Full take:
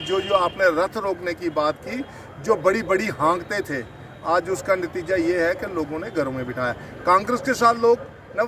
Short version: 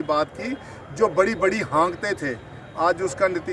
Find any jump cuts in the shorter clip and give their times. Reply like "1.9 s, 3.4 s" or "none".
none